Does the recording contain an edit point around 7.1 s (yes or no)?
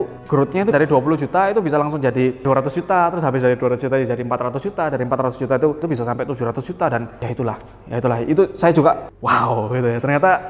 no